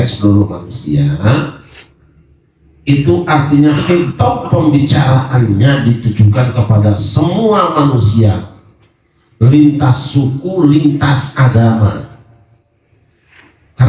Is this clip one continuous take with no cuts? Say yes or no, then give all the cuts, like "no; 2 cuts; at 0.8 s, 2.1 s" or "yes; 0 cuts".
yes; 0 cuts